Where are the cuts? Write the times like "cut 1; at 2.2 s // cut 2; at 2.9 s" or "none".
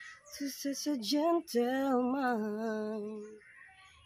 none